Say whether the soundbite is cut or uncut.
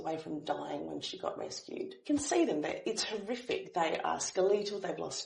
cut